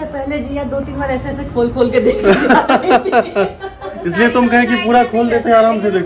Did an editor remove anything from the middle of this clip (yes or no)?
no